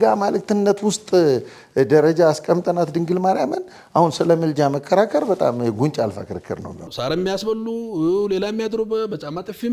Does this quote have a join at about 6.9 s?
yes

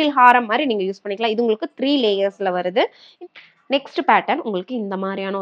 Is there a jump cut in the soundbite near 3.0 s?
yes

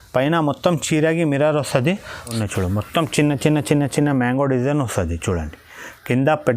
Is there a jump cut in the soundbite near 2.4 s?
yes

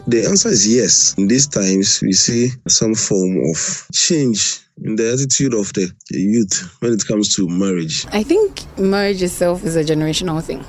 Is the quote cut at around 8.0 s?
yes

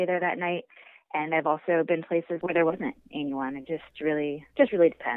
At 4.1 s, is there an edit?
no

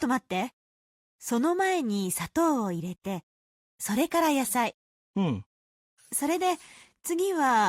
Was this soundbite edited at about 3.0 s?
no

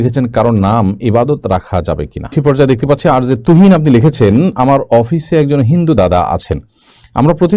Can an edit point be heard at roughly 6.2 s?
no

